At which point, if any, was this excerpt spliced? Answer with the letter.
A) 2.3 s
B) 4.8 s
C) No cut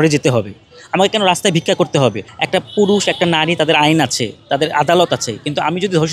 A